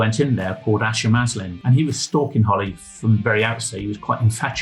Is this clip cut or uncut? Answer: cut